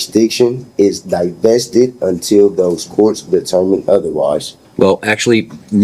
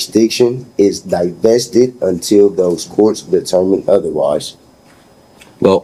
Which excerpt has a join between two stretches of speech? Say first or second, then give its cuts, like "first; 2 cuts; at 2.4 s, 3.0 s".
first; 1 cut; at 4.6 s